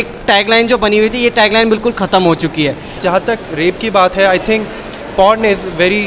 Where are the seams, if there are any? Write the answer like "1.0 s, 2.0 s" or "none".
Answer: 2.9 s